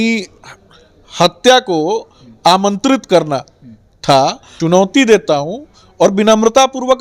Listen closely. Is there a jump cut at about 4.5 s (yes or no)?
yes